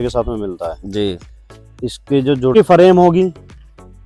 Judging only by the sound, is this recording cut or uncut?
cut